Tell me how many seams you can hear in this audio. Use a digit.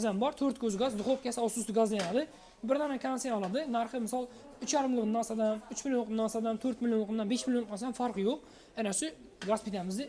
0